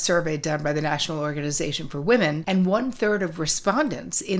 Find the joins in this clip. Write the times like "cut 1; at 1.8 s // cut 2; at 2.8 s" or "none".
cut 1; at 2.4 s